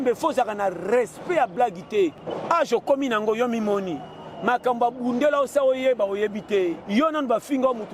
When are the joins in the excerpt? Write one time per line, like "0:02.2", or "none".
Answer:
0:02.3
0:06.8